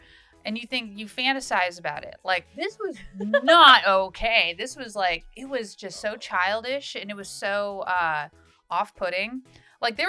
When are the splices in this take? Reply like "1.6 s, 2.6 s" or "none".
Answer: 2.5 s